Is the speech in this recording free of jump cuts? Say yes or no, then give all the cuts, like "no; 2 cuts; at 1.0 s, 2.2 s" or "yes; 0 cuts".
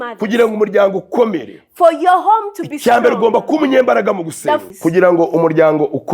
no; 1 cut; at 4.7 s